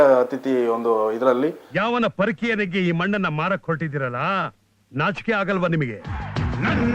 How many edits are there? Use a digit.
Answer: 1